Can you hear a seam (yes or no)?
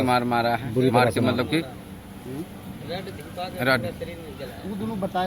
no